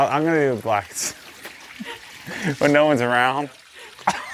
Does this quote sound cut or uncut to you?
uncut